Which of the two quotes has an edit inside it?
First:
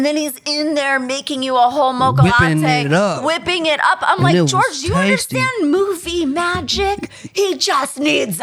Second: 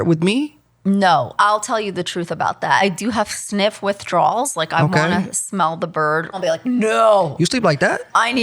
second; 3 cuts; at 1.3 s, 2.8 s, 6.3 s

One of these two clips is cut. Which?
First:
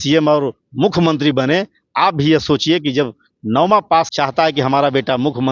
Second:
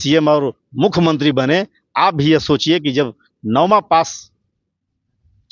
first; 1 cut; at 4.1 s

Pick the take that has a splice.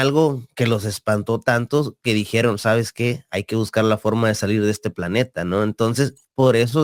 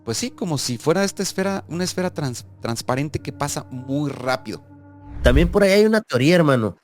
second; 1 cut; at 5.2 s

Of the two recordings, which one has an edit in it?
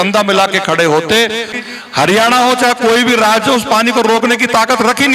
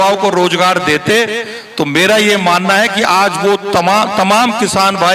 first; 1 cut; at 1.5 s

